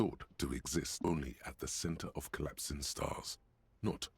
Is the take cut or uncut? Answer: cut